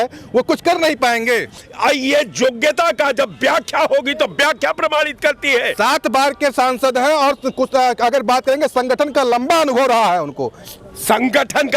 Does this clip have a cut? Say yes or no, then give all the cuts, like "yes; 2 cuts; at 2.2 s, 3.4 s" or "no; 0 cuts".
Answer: no; 0 cuts